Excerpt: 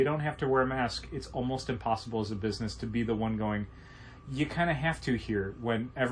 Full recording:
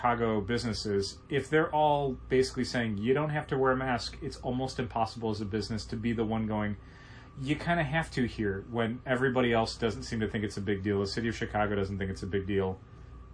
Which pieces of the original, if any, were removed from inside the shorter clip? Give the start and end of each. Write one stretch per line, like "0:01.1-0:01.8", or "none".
none